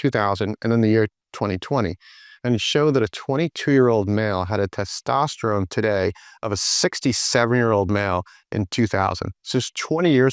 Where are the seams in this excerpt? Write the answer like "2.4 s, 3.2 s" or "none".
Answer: none